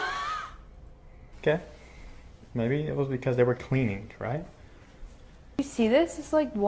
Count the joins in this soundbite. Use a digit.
1